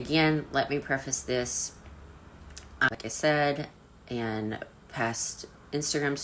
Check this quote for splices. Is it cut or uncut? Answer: uncut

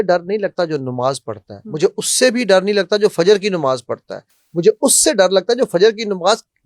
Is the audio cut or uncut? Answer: uncut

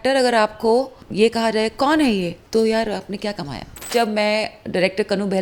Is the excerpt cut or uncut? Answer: cut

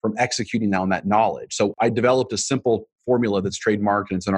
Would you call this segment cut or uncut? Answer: cut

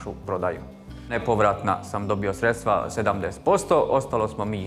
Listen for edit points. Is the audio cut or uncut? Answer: cut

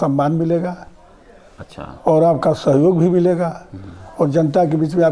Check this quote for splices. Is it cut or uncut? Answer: uncut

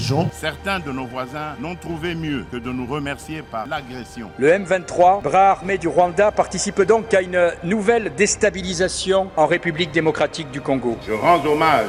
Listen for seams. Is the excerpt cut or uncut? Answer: uncut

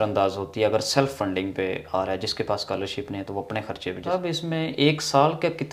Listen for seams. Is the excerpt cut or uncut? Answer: cut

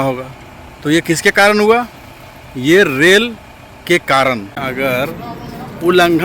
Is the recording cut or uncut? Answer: cut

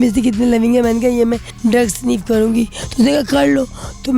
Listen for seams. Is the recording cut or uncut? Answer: cut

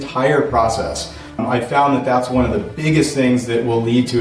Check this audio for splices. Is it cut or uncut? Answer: cut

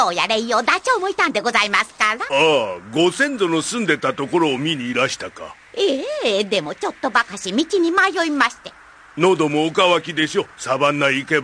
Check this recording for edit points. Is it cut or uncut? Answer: cut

